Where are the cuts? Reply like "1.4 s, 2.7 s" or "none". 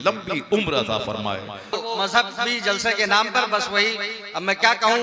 1.7 s